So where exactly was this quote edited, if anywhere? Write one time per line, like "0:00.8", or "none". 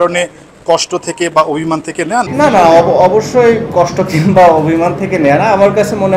0:02.3